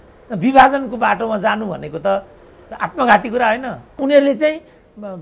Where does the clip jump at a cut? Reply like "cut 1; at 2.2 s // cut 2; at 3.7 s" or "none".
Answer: cut 1; at 4.0 s